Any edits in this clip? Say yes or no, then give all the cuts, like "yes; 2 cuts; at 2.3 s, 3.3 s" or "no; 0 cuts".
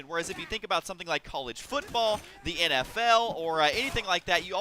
no; 0 cuts